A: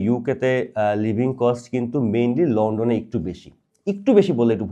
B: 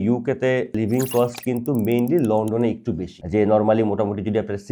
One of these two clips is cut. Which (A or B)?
B